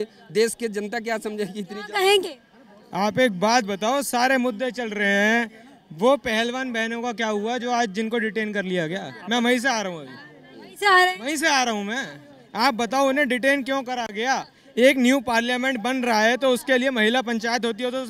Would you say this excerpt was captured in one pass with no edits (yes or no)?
yes